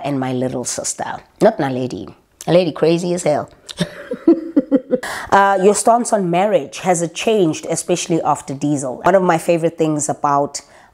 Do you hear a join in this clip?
yes; 2 cuts; at 5.1 s, 9.1 s

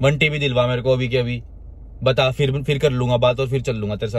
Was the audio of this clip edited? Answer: no; 0 cuts

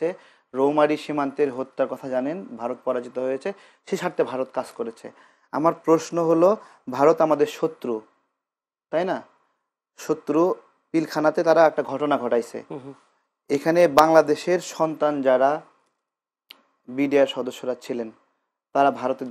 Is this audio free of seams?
yes; 0 cuts

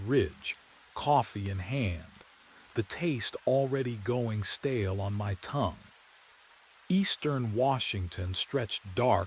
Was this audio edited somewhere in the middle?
no; 0 cuts

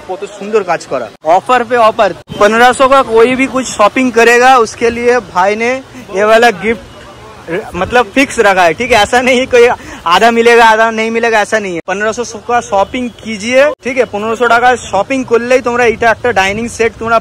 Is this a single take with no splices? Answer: no; 4 cuts; at 1.1 s, 2.2 s, 11.8 s, 13.8 s

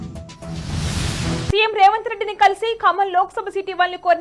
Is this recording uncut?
no; 1 cut; at 1.4 s

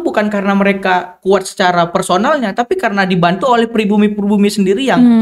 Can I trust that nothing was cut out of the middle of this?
yes; 0 cuts

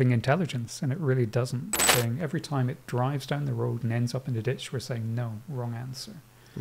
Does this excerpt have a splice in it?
yes; 1 cut; at 1.9 s

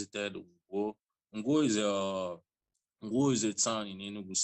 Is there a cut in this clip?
no; 0 cuts

